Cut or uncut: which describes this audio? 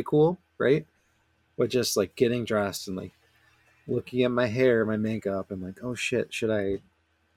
uncut